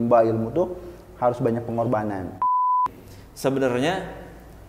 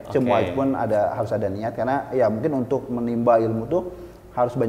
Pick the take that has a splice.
first; 1 cut; at 2.6 s

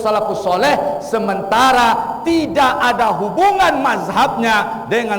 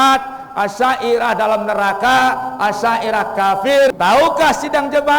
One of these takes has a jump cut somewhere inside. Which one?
second; 1 cut; at 3.9 s

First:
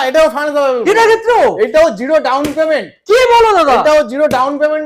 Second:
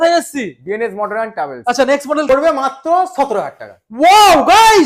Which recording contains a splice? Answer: second; 1 cut; at 2.3 s

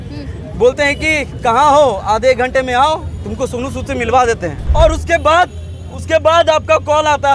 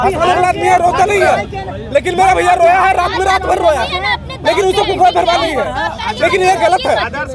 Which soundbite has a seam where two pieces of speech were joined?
first; 1 cut; at 4.6 s

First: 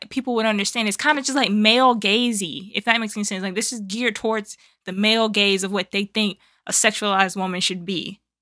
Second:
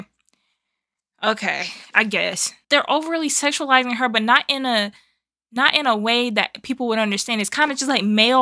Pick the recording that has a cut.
second; 1 cut; at 2.5 s

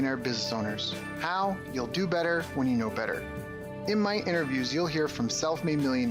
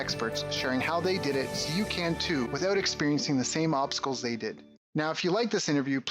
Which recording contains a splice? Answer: second; 1 cut; at 4.7 s

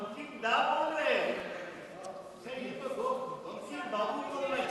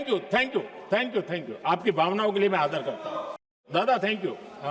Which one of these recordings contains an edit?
second; 1 cut; at 3.6 s

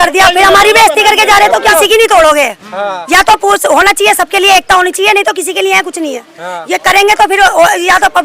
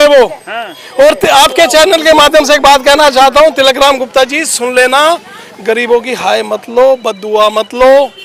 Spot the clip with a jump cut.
first; 1 cut; at 1.7 s

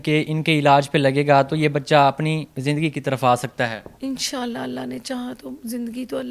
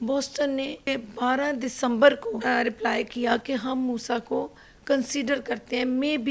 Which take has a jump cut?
second; 2 cuts; at 0.9 s, 2.4 s

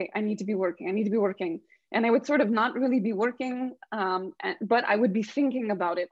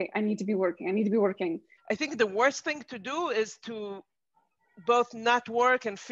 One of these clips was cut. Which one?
second; 1 cut; at 1.7 s

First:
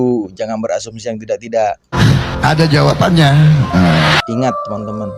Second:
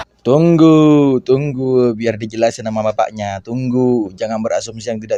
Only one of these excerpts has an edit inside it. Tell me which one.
first; 1 cut; at 4.2 s

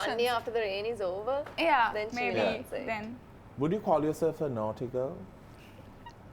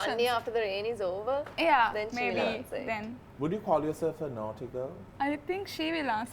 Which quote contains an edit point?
second; 2 cuts; at 3.2 s, 5.0 s

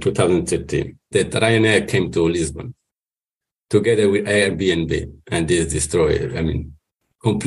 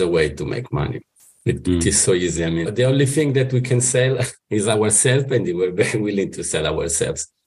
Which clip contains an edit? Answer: first; 1 cut; at 1.1 s

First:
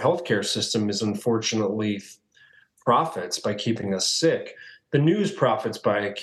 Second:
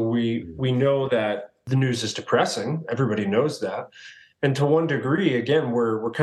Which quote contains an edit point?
second; 1 cut; at 1.6 s

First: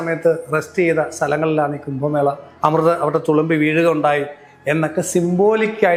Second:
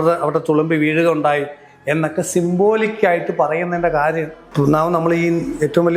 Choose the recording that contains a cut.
second; 1 cut; at 4.4 s

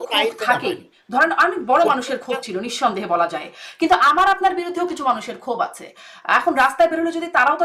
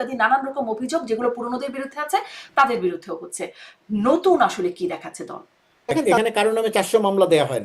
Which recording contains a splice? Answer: second; 1 cut; at 6.1 s

